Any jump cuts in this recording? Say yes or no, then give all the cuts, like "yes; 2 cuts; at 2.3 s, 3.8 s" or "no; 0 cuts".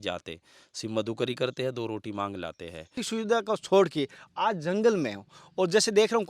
yes; 1 cut; at 3.0 s